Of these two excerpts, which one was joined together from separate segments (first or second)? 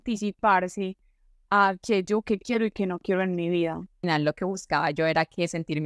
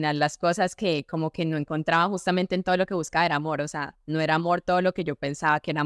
first